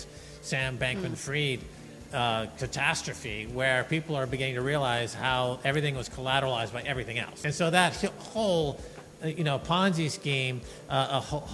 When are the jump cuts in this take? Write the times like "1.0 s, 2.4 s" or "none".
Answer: 7.3 s